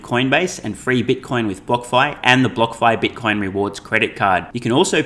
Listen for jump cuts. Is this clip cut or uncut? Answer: uncut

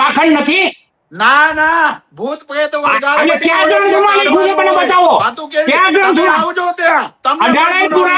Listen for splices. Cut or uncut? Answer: uncut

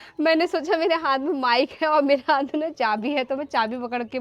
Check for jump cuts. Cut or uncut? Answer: uncut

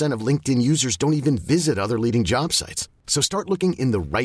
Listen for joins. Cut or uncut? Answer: uncut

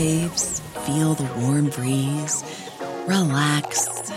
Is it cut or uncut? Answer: uncut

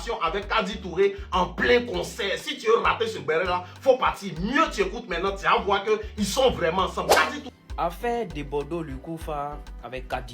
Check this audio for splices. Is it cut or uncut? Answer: cut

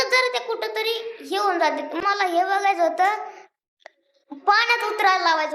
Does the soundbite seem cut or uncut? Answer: cut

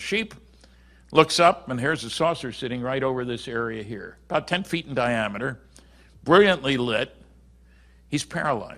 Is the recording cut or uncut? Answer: uncut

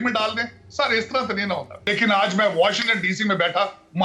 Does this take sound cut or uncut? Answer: cut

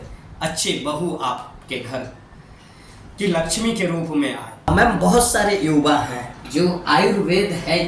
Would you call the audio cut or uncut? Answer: cut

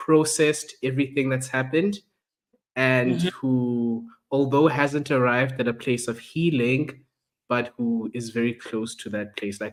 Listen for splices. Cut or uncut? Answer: uncut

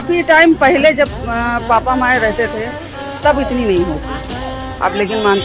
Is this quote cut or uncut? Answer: uncut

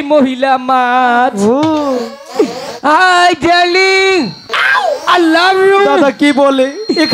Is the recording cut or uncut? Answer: cut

